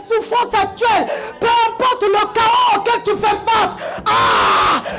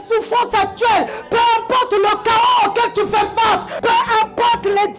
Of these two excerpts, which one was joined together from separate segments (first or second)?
second